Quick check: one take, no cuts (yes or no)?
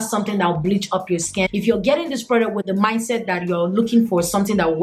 yes